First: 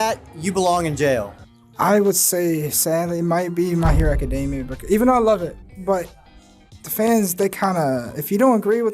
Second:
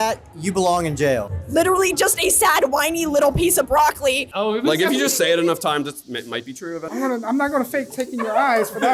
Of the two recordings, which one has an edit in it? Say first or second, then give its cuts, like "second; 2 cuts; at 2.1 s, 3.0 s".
second; 3 cuts; at 1.4 s, 4.3 s, 6.8 s